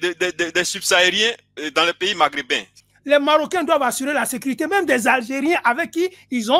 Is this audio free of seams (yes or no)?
no